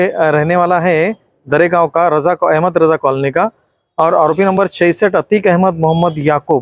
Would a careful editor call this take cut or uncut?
uncut